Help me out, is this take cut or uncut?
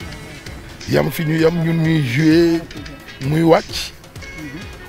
uncut